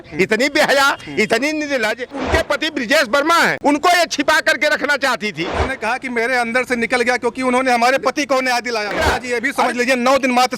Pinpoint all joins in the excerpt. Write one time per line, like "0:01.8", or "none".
0:02.2
0:03.6
0:05.7
0:08.9